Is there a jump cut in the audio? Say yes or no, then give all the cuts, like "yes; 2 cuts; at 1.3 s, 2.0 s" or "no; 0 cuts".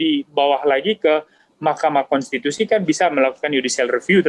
no; 0 cuts